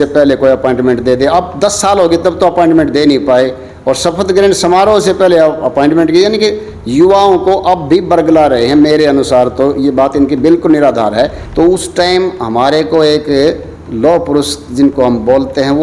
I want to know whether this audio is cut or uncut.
cut